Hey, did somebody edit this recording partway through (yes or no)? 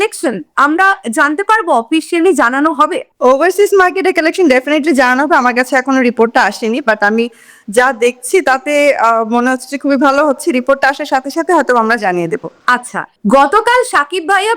no